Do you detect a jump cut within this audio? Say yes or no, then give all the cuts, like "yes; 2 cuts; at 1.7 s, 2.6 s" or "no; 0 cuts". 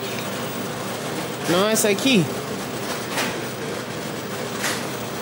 no; 0 cuts